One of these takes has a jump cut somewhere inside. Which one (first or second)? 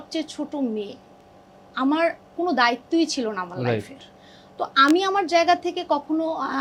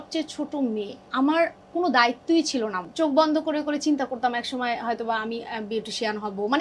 second